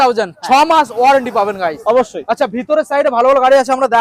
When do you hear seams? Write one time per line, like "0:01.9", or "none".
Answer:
none